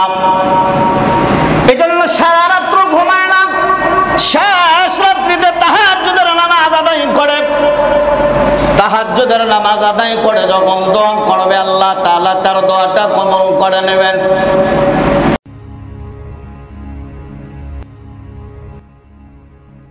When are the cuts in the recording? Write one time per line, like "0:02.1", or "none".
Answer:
0:15.3